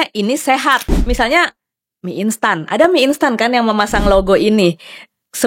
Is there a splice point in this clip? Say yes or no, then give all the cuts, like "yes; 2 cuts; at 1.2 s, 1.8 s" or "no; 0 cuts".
yes; 1 cut; at 0.9 s